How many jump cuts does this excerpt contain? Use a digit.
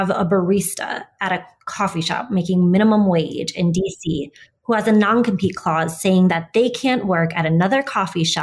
0